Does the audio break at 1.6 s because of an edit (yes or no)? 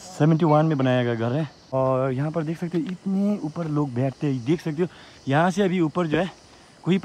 yes